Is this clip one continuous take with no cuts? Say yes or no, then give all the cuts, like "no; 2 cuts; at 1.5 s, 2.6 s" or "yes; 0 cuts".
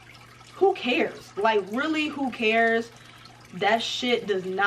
yes; 0 cuts